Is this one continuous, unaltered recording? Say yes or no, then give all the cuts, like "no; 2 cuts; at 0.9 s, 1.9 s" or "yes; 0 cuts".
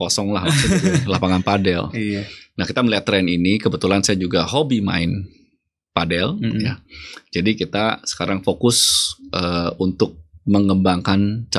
yes; 0 cuts